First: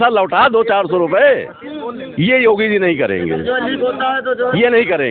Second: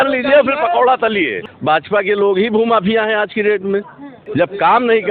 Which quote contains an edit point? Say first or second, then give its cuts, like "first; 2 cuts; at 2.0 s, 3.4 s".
second; 2 cuts; at 1.5 s, 4.2 s